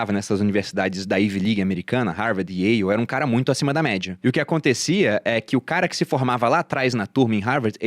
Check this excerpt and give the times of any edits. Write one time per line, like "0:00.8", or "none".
0:04.1